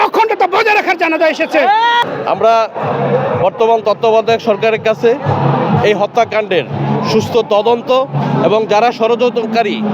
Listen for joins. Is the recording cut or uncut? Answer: cut